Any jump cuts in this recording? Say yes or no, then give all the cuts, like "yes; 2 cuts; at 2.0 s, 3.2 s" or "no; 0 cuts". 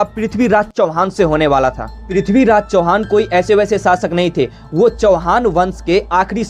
no; 0 cuts